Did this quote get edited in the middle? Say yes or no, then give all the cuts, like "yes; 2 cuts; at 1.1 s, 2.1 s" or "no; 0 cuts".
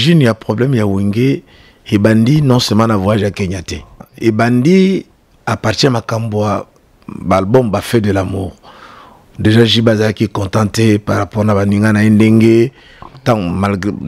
yes; 1 cut; at 4.1 s